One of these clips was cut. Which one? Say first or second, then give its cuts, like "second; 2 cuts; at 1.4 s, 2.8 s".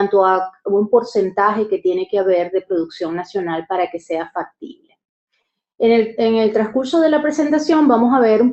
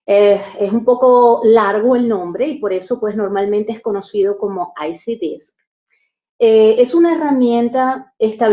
first; 1 cut; at 6.2 s